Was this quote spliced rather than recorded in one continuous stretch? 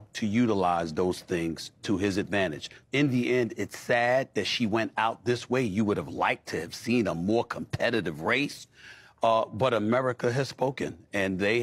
no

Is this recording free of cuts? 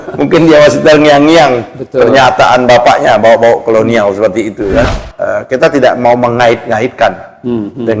no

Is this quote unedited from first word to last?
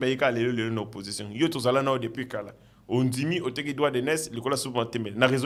yes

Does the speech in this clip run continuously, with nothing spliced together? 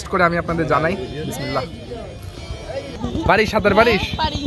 no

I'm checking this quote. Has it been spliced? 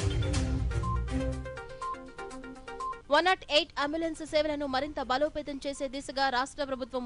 yes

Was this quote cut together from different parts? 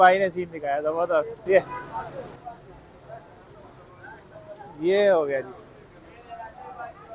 no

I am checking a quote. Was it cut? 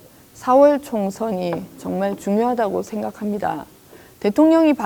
no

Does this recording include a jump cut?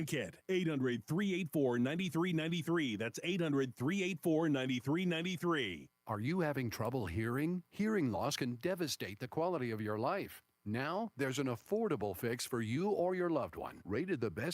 yes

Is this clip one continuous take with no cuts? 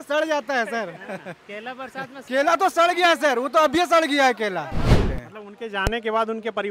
no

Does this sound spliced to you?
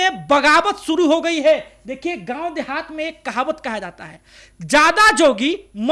no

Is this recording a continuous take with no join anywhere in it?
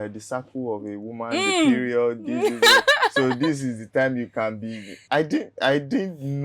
no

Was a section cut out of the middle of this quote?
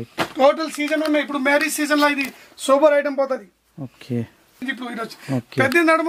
yes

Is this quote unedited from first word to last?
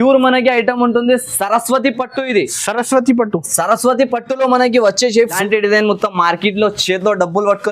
no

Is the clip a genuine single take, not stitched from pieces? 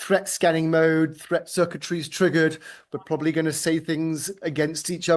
yes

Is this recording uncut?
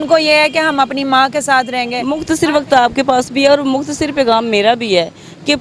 no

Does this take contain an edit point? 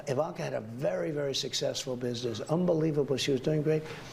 no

